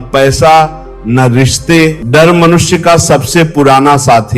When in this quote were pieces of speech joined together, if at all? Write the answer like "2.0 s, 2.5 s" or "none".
2.0 s